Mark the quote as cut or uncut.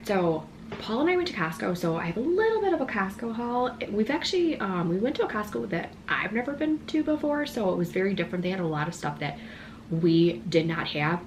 uncut